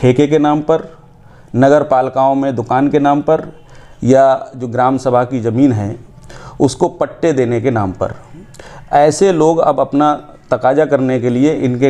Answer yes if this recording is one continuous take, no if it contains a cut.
yes